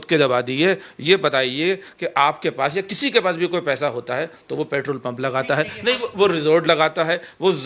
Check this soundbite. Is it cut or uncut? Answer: uncut